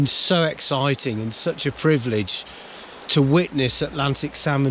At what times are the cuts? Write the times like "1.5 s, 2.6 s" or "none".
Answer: none

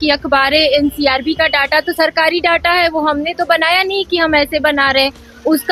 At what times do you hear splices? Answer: none

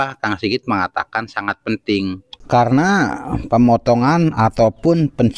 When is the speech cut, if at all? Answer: 2.3 s

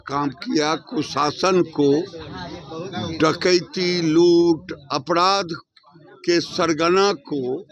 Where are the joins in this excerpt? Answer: none

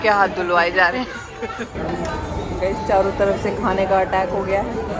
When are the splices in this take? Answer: 1.7 s

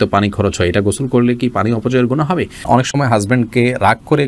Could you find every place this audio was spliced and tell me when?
2.6 s

